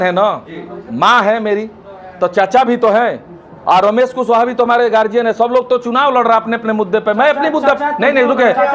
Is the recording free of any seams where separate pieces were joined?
yes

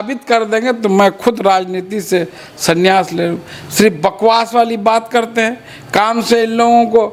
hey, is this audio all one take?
yes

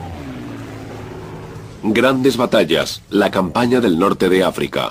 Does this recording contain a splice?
no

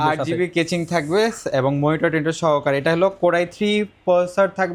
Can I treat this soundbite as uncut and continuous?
yes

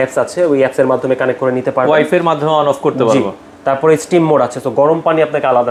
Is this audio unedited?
yes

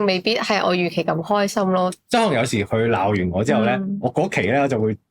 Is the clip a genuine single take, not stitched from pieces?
no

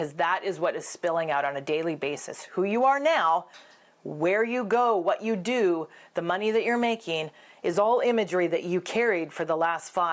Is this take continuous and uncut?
yes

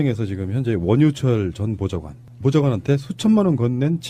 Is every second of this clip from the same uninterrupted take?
yes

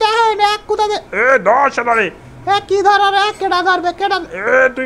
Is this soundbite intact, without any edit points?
yes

